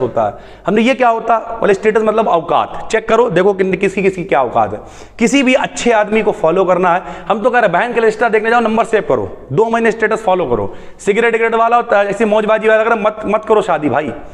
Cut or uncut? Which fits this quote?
uncut